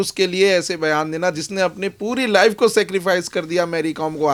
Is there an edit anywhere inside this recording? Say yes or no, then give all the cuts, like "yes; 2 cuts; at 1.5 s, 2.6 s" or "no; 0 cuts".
no; 0 cuts